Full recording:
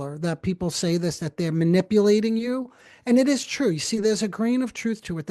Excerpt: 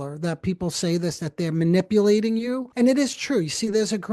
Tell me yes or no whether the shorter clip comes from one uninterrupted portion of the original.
no